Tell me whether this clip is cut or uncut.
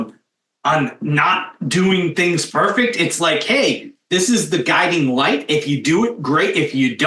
uncut